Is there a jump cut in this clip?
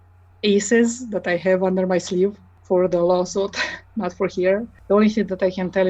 yes; 2 cuts; at 2.5 s, 4.7 s

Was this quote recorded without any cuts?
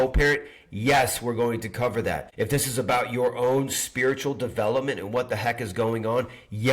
no; 1 cut; at 2.3 s

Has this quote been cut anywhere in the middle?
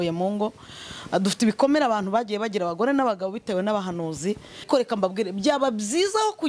yes; 1 cut; at 4.7 s

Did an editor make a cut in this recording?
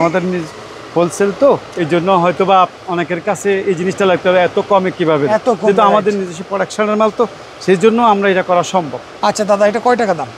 no; 0 cuts

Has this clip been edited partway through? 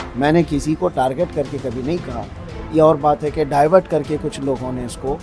no; 0 cuts

